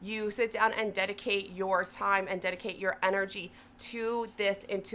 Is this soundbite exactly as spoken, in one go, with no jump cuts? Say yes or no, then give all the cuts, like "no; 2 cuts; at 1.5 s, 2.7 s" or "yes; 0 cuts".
yes; 0 cuts